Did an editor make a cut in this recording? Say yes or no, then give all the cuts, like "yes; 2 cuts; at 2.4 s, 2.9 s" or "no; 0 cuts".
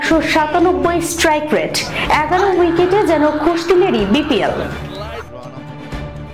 no; 0 cuts